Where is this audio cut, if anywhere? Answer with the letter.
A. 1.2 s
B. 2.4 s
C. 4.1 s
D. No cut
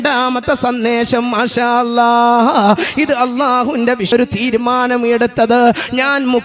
C